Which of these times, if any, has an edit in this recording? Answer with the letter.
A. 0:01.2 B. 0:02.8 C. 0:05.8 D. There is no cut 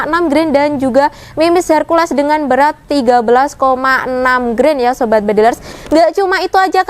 C